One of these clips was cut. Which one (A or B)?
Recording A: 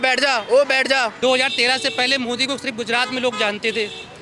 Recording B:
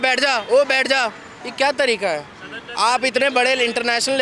A